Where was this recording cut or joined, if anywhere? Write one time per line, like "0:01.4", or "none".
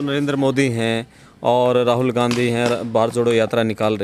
none